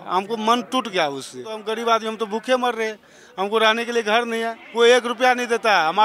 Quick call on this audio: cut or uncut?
cut